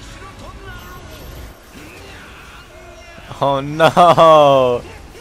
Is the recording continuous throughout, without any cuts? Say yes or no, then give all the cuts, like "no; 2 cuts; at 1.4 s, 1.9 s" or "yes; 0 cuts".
yes; 0 cuts